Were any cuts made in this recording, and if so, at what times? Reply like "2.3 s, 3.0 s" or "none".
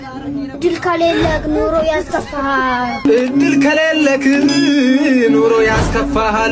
none